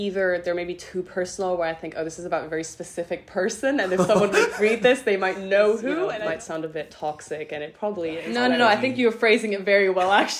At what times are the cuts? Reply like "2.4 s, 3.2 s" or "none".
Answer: 6.2 s, 8.2 s